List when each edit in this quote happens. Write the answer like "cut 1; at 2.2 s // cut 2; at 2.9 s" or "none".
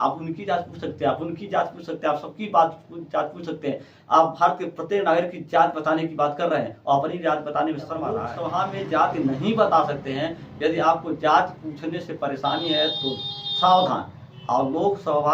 cut 1; at 8.3 s